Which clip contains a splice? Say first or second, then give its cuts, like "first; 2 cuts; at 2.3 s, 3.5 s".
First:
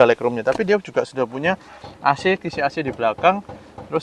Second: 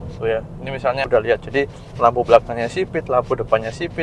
second; 1 cut; at 1.0 s